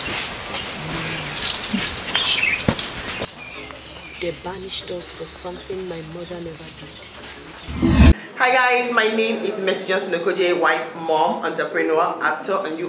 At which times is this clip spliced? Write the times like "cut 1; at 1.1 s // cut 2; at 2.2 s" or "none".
cut 1; at 8.1 s